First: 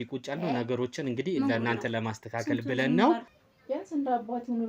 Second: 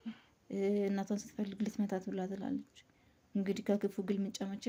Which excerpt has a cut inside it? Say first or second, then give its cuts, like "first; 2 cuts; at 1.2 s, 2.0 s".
first; 1 cut; at 3.3 s